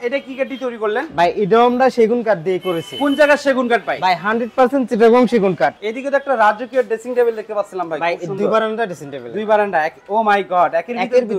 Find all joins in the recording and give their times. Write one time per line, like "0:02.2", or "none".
0:05.8